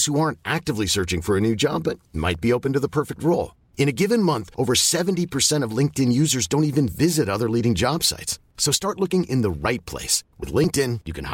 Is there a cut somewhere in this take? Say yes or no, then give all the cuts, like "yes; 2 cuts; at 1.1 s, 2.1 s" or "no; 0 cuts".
no; 0 cuts